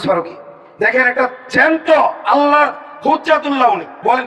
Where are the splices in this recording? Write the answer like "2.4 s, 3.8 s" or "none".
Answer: none